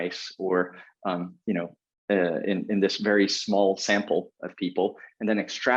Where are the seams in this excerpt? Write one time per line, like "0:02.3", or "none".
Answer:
none